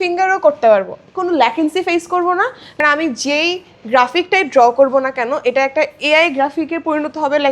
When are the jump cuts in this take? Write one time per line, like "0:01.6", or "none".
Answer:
0:02.8